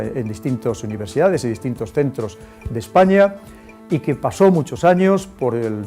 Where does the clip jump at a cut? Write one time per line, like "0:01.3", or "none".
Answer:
0:04.7